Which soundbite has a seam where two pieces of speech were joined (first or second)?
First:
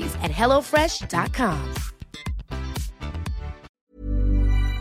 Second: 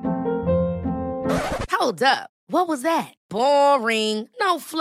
first